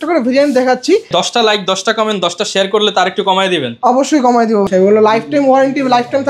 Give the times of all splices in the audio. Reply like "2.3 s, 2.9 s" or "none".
1.1 s, 4.7 s